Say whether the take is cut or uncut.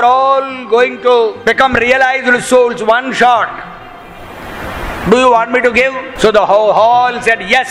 cut